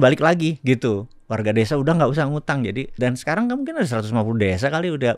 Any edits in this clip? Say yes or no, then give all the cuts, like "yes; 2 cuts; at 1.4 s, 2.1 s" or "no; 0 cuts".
yes; 1 cut; at 2.9 s